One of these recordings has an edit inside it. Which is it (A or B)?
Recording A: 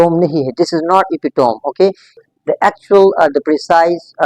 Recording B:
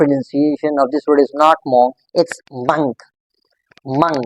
A